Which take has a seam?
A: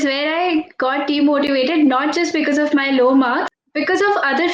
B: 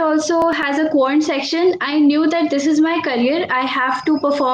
A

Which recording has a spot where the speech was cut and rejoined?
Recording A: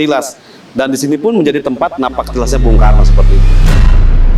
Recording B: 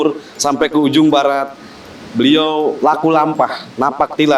B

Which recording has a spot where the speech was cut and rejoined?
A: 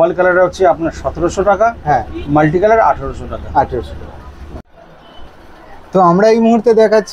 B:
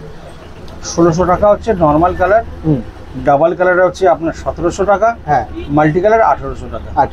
A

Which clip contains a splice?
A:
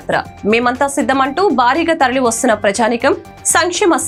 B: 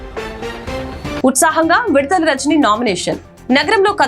B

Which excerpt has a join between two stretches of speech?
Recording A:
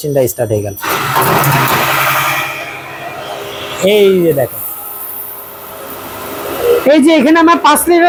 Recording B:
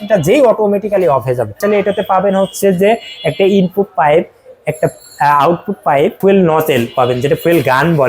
B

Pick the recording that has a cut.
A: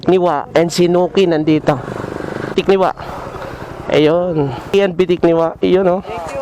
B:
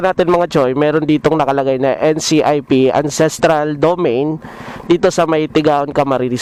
A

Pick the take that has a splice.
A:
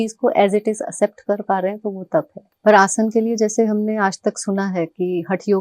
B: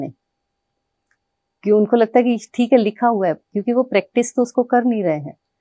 A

